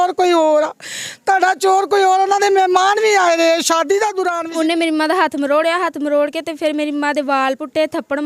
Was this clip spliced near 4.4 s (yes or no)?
yes